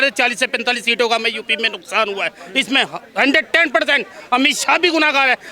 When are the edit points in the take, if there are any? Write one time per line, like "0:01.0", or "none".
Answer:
none